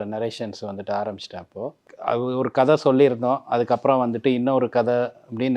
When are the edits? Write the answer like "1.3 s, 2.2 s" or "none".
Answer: 1.9 s